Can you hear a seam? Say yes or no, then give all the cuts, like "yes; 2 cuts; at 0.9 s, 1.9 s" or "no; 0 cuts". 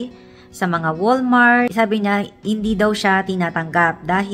no; 0 cuts